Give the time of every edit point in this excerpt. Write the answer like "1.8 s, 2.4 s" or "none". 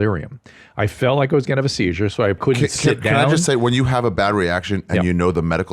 2.4 s